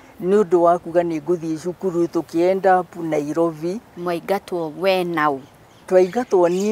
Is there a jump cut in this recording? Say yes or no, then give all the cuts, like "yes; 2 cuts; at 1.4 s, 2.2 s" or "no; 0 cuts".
no; 0 cuts